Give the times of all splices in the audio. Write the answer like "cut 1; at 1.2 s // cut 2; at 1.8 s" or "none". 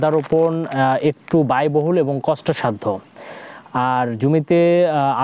none